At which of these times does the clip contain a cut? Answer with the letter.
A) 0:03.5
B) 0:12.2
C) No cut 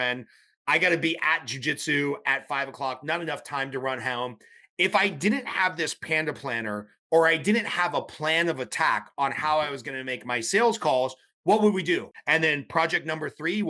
B